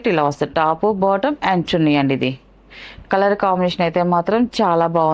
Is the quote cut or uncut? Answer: uncut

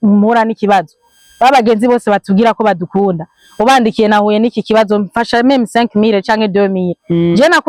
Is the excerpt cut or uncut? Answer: uncut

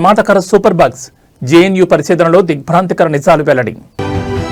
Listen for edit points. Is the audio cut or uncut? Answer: uncut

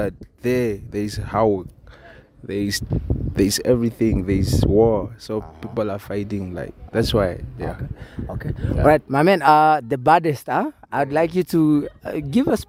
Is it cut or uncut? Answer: uncut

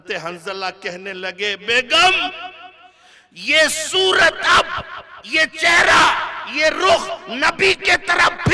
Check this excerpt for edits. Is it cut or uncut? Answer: uncut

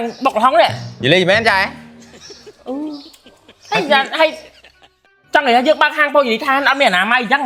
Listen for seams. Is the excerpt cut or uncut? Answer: uncut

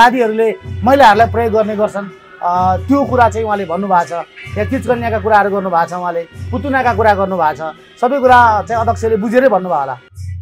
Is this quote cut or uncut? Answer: uncut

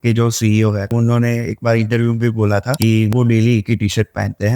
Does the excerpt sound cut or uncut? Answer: cut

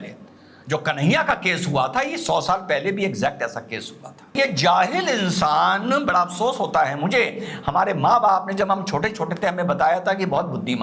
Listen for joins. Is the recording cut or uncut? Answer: cut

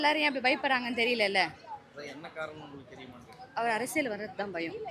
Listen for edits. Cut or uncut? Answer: uncut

